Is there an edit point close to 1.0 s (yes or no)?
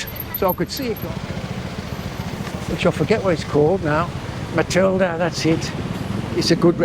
yes